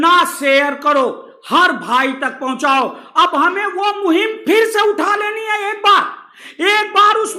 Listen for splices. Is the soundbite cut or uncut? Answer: uncut